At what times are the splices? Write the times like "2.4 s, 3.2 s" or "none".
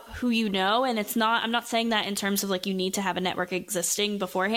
none

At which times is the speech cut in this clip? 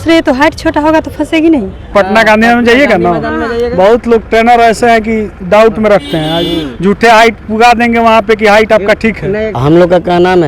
1.9 s, 9.5 s

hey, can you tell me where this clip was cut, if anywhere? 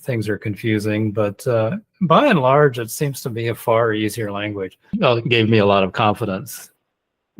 4.8 s

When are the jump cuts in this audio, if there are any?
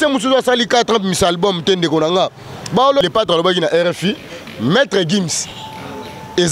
3.0 s

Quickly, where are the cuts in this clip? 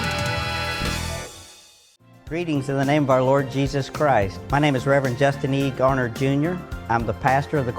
1.9 s

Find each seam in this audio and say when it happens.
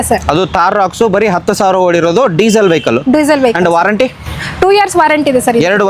none

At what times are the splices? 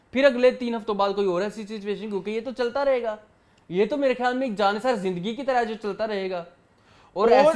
none

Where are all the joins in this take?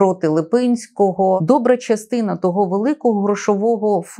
1.4 s

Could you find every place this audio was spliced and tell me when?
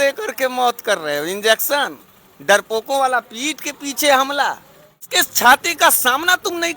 5.1 s

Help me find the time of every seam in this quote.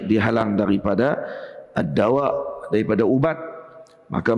none

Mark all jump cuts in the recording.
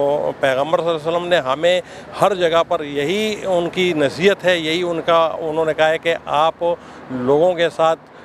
none

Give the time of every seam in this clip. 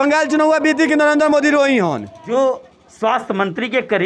2.1 s

